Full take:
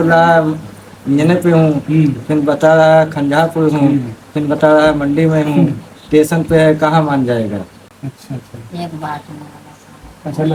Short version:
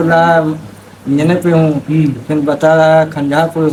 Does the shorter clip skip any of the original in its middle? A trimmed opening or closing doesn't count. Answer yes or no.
no